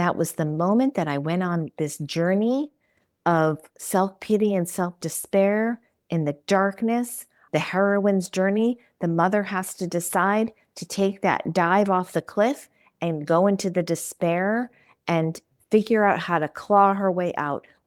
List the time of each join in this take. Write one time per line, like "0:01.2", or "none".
none